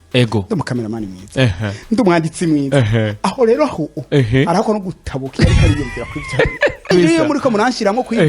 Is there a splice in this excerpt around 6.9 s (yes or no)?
yes